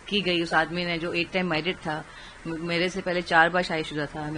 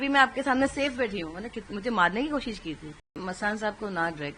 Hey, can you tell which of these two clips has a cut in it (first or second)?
second